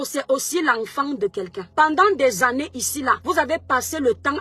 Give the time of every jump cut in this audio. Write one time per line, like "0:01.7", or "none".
0:01.6
0:03.2